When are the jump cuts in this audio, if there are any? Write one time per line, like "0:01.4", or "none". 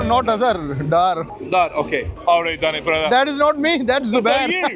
0:02.1